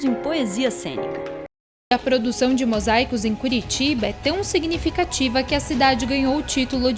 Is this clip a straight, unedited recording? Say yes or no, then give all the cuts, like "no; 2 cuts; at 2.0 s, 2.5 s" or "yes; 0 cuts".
no; 1 cut; at 1.5 s